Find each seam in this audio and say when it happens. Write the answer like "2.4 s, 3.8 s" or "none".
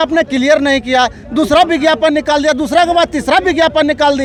none